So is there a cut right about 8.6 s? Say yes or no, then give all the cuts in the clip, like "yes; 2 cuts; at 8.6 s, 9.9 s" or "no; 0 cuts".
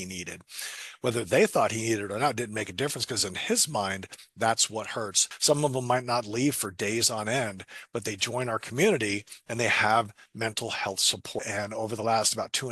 no; 2 cuts; at 5.3 s, 11.4 s